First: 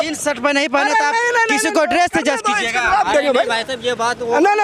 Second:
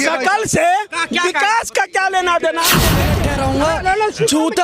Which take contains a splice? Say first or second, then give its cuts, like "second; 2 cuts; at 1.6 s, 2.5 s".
second; 1 cut; at 3.0 s